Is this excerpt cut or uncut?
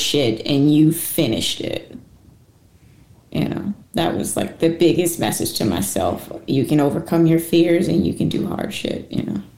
uncut